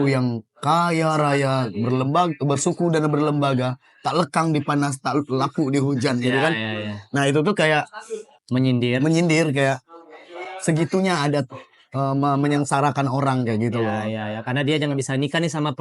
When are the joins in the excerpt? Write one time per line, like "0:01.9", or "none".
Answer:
none